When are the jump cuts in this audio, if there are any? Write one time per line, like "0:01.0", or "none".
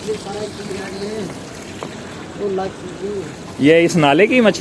none